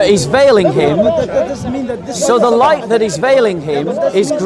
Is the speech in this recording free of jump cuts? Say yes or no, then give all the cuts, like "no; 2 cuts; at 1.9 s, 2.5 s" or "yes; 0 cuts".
yes; 0 cuts